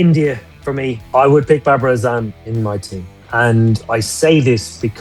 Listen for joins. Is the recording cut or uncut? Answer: cut